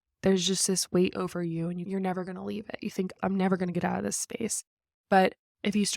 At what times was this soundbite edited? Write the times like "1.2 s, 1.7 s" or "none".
1.9 s, 3.2 s